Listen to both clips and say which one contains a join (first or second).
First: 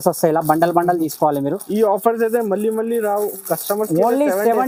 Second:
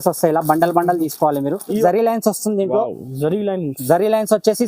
second